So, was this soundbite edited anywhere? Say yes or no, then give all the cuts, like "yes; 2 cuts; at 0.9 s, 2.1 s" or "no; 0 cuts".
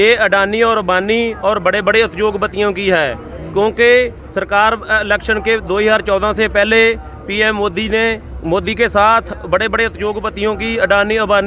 no; 0 cuts